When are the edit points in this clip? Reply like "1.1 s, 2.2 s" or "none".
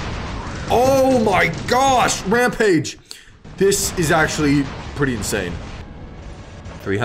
5.8 s